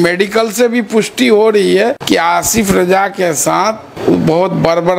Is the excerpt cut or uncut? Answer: cut